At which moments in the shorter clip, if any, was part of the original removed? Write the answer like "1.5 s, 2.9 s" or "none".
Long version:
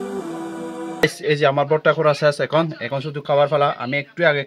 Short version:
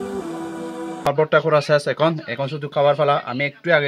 1.1 s